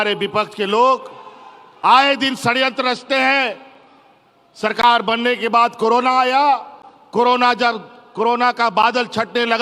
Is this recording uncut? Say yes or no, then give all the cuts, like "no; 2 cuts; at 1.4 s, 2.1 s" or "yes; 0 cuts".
yes; 0 cuts